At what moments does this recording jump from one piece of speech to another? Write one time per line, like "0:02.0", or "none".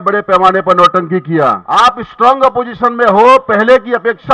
0:01.6